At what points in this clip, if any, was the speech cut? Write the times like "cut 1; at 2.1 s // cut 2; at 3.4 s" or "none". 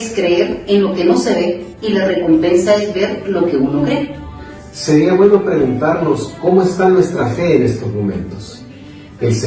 none

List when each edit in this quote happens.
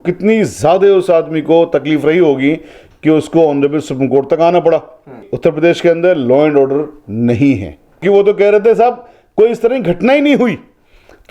cut 1; at 5.3 s // cut 2; at 8.0 s

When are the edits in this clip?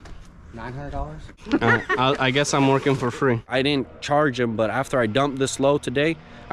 cut 1; at 1.4 s // cut 2; at 3.5 s

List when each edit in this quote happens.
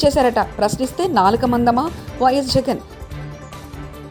none

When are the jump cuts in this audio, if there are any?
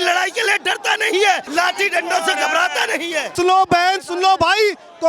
cut 1; at 1.5 s

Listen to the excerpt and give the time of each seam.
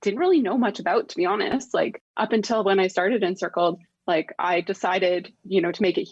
none

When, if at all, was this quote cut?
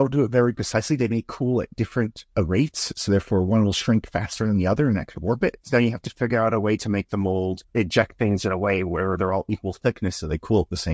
cut 1; at 2.2 s // cut 2; at 5.6 s // cut 3; at 7.6 s

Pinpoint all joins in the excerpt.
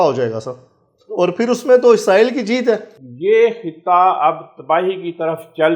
none

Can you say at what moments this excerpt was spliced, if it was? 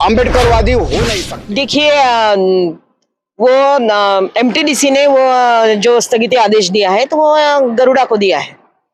cut 1; at 1.3 s

